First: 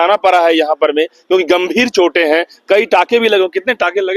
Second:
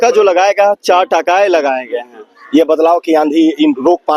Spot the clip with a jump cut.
second; 1 cut; at 2.3 s

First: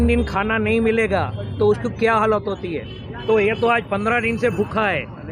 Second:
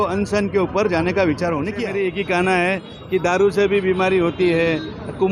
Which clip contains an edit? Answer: second; 1 cut; at 1.8 s

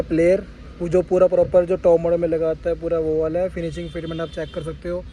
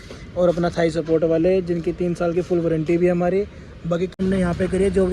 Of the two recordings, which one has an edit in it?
second; 1 cut; at 4.1 s

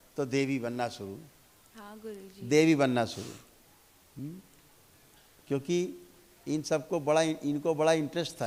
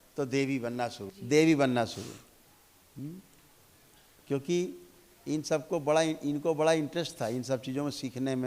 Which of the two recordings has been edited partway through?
second; 1 cut; at 1.1 s

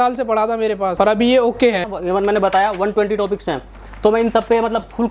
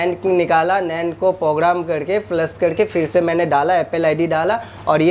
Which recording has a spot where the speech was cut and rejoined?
first; 2 cuts; at 0.9 s, 1.9 s

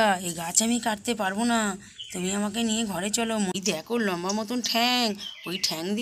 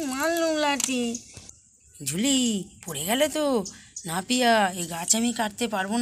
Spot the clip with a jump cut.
first; 1 cut; at 3.5 s

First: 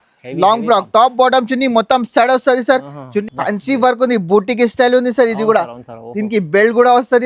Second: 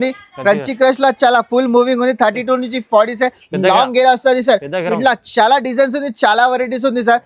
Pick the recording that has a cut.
first; 1 cut; at 3.2 s

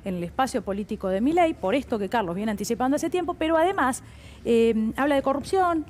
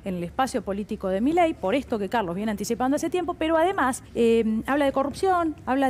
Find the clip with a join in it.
second; 1 cut; at 4.0 s

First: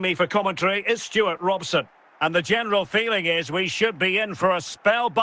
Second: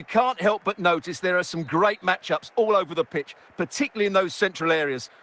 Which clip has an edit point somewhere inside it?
first; 1 cut; at 2.0 s

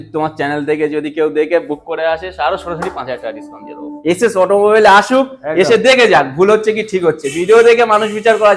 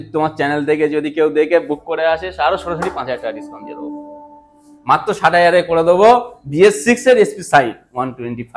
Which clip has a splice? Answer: first; 1 cut; at 3.9 s

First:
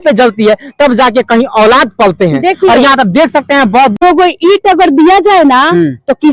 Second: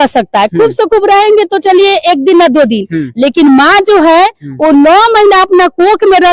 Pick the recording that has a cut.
first; 1 cut; at 3.9 s

